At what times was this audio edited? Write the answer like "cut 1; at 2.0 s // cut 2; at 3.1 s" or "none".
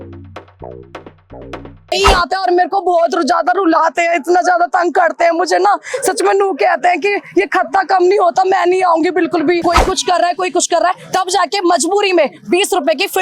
cut 1; at 1.9 s // cut 2; at 9.6 s